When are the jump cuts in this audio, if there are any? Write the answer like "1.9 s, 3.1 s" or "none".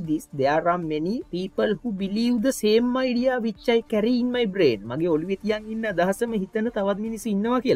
1.3 s